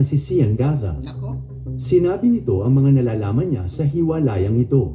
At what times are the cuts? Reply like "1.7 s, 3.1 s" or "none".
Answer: 2.3 s